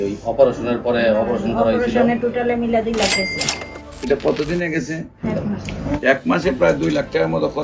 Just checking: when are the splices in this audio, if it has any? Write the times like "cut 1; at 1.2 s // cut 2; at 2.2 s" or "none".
cut 1; at 5.2 s